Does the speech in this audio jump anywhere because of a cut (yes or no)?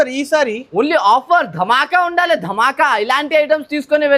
no